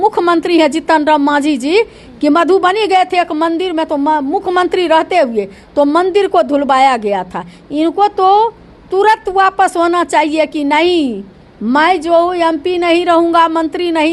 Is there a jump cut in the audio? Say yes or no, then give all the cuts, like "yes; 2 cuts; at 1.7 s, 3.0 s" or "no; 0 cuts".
no; 0 cuts